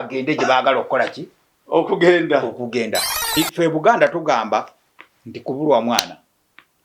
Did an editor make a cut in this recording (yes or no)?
yes